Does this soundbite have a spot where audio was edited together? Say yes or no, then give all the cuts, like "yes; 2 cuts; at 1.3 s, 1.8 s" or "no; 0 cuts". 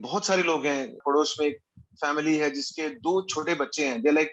yes; 1 cut; at 1.0 s